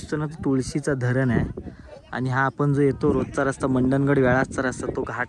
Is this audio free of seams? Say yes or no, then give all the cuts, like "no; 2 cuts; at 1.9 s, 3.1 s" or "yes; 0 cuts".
yes; 0 cuts